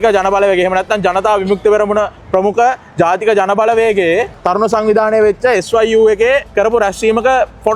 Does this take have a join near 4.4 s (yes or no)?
yes